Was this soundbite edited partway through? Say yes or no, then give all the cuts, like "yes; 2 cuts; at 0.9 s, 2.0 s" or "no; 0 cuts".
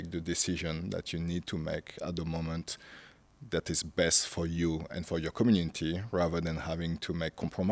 no; 0 cuts